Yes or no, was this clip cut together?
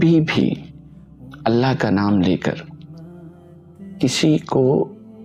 no